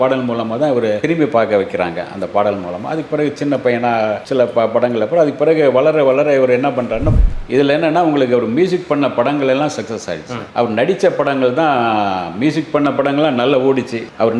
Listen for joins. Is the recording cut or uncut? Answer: cut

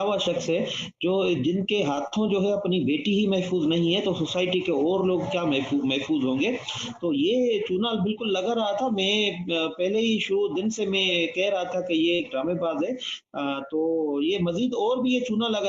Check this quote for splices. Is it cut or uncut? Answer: uncut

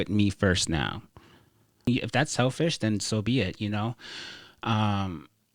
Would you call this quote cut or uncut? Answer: cut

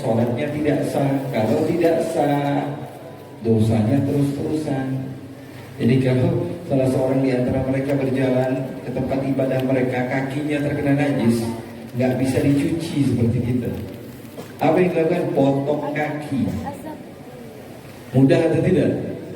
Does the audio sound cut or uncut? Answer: uncut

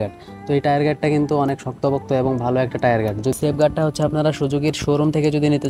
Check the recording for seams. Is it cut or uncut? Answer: cut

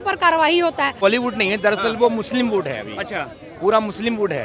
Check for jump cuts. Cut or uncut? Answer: cut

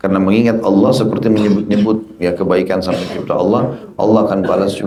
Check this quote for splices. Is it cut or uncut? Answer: uncut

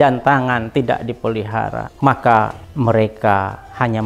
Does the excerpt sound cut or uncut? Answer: cut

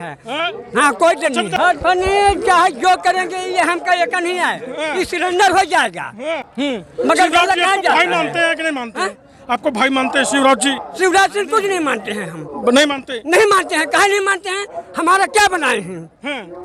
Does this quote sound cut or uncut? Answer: uncut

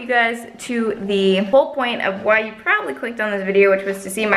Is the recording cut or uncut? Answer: cut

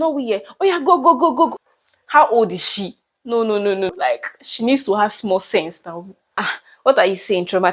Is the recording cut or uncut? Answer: cut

